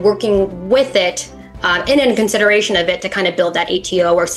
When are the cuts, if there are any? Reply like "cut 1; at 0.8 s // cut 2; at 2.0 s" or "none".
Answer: none